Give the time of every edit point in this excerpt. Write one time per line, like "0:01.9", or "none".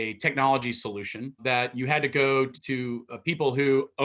0:01.4
0:02.6